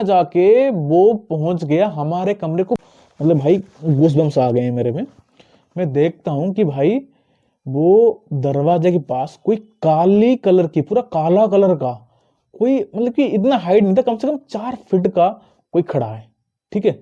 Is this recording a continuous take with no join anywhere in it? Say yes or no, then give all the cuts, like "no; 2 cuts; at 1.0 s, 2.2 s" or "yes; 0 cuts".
no; 1 cut; at 2.8 s